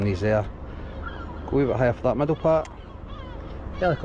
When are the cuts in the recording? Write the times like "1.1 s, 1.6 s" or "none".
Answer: none